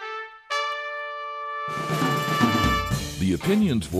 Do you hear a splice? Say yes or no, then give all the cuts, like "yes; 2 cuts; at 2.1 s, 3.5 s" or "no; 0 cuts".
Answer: yes; 1 cut; at 3.0 s